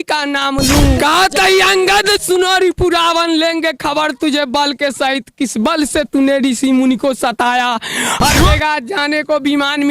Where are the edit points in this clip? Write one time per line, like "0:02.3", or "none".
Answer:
0:01.0
0:08.5